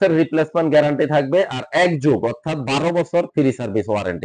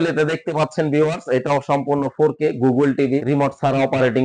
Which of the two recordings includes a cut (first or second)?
second